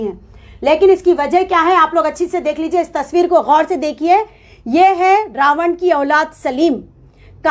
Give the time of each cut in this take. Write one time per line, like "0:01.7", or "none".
none